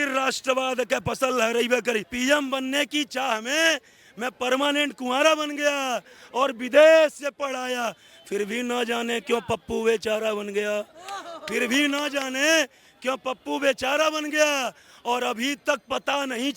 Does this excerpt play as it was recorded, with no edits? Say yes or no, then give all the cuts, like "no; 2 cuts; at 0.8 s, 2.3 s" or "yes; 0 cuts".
no; 1 cut; at 2.1 s